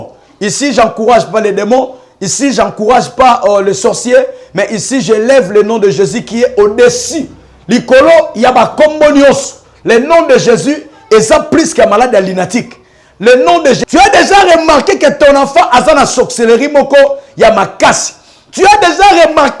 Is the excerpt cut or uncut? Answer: cut